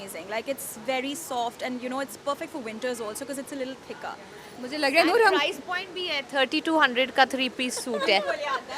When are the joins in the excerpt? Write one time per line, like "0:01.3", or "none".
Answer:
none